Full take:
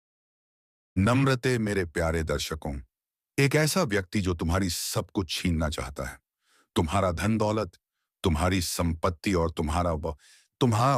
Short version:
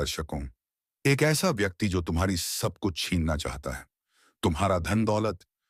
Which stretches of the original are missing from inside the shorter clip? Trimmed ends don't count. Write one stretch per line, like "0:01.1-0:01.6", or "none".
none